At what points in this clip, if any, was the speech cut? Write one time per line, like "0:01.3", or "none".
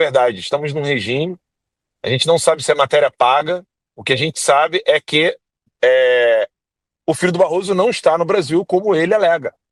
none